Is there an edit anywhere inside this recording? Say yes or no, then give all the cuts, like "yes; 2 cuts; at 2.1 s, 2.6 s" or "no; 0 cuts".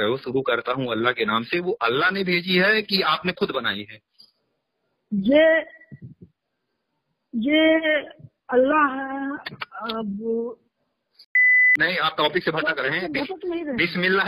yes; 1 cut; at 11.5 s